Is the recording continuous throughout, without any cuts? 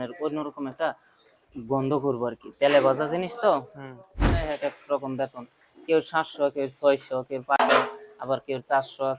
no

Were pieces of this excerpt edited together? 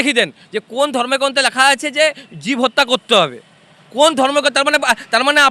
no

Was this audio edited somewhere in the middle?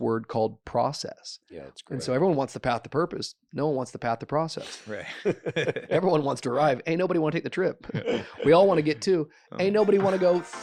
no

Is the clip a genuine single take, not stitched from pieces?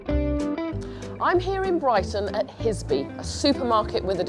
yes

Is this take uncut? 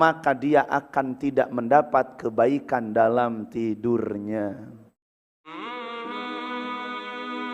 no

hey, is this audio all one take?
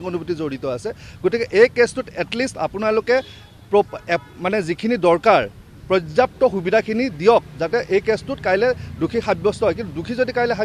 yes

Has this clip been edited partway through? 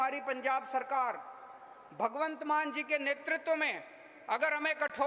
no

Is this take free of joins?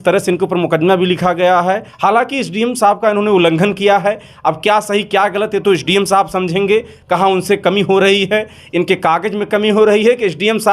no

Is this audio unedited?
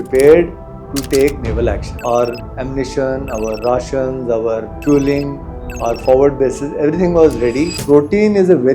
no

